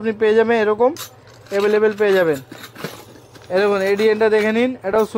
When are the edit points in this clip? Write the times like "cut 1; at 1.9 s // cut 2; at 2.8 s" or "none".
none